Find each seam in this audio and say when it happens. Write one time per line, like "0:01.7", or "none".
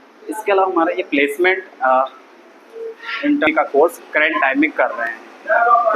0:03.5